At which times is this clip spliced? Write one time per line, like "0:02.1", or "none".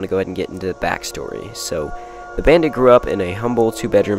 0:02.6